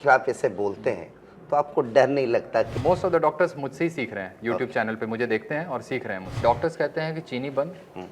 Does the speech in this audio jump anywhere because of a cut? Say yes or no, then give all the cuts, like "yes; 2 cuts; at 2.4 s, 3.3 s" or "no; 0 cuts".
yes; 2 cuts; at 2.7 s, 6.4 s